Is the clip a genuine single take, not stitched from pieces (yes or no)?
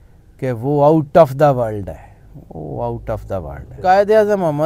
no